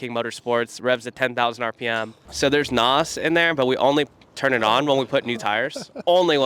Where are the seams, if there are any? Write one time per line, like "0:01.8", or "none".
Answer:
0:02.1